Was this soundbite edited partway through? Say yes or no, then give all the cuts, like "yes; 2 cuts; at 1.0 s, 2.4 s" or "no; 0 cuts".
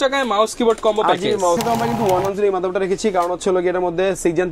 yes; 1 cut; at 1.6 s